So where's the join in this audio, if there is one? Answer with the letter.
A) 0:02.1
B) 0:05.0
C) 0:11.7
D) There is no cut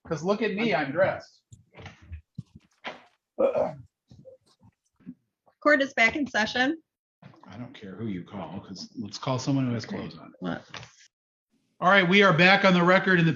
B